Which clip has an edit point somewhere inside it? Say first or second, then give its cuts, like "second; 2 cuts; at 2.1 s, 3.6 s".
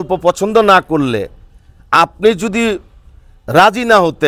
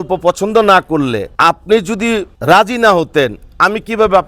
second; 2 cuts; at 1.3 s, 2.3 s